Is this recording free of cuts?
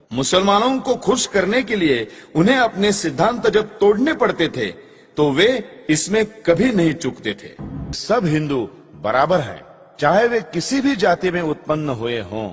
no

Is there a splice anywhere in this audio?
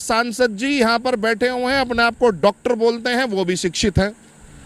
no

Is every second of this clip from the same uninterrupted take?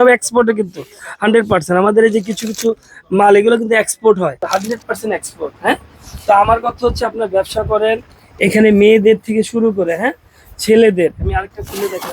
no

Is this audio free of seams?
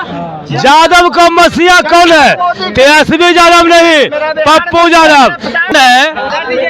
no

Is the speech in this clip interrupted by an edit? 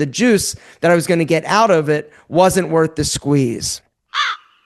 no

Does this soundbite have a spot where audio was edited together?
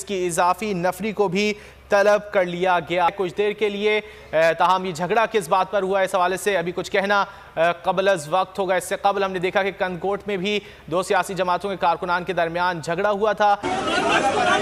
no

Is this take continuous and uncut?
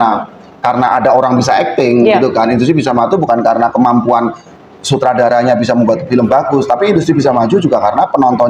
yes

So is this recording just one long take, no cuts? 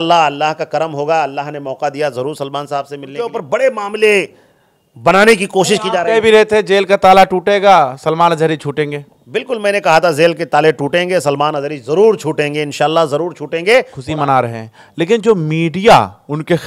no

